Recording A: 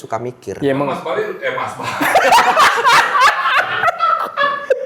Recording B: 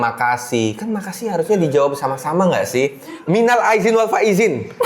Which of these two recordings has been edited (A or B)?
B